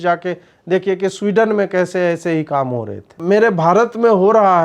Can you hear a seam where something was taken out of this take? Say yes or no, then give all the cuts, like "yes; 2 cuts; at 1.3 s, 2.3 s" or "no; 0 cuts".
yes; 1 cut; at 3.2 s